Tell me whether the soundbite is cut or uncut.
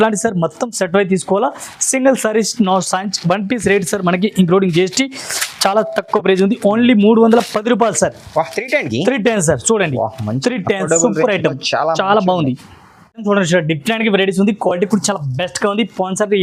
uncut